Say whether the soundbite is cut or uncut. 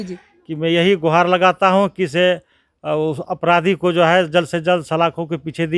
uncut